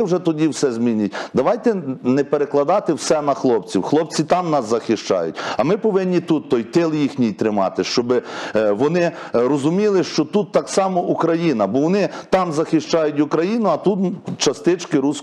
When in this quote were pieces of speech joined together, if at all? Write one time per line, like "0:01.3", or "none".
none